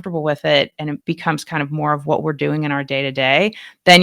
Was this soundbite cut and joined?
yes; 1 cut; at 1.0 s

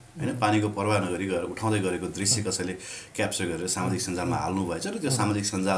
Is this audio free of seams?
yes; 0 cuts

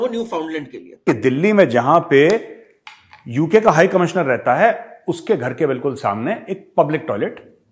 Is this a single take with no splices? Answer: no; 1 cut; at 1.0 s

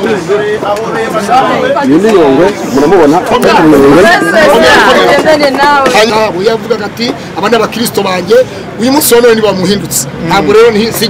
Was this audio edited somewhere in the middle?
yes; 1 cut; at 6.1 s

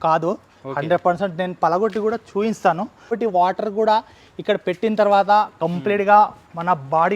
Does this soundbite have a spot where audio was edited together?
yes; 1 cut; at 3.2 s

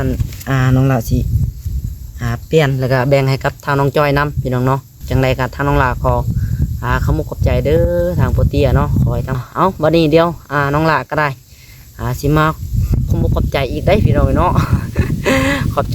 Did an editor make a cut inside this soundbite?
yes; 2 cuts; at 5.0 s, 9.4 s

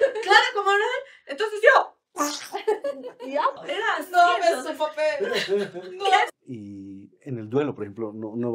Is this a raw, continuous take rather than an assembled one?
no; 2 cuts; at 3.6 s, 6.3 s

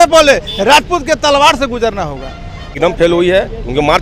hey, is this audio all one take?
no; 1 cut; at 2.6 s

